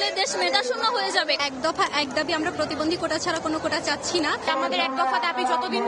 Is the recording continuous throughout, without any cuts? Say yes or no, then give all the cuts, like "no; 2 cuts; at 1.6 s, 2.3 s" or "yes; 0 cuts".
yes; 0 cuts